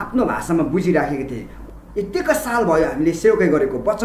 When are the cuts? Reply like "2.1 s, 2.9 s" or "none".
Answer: 1.5 s